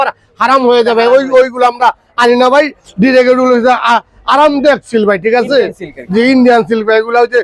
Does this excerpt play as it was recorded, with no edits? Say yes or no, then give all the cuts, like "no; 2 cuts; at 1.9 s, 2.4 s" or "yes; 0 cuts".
yes; 0 cuts